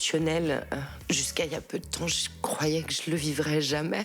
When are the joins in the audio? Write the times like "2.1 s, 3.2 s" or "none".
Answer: 1.0 s